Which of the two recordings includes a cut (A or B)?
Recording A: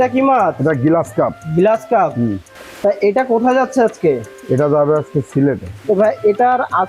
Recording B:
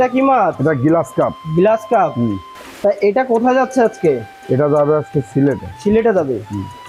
A